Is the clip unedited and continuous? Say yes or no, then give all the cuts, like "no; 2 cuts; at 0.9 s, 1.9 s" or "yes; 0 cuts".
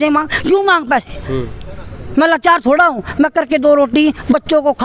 yes; 0 cuts